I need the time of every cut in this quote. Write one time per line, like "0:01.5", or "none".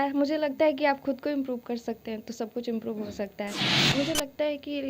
0:03.9

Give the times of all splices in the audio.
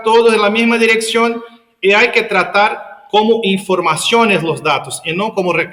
none

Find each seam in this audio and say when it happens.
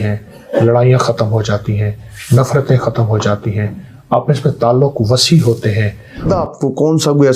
0:06.3

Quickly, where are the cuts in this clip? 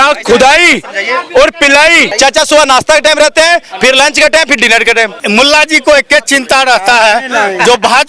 0:02.1
0:05.2

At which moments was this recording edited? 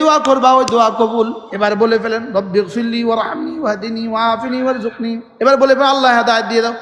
0:01.4
0:05.3

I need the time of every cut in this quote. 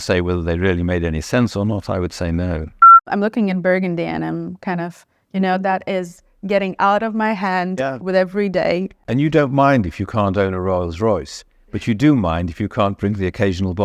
0:03.1
0:09.0

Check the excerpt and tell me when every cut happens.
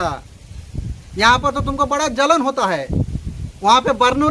none

